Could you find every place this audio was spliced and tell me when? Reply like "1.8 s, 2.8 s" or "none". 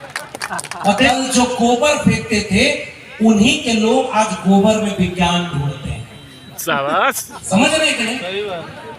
1.1 s